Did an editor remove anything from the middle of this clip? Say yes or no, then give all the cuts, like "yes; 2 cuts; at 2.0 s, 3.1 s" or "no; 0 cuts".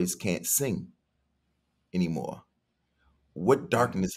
no; 0 cuts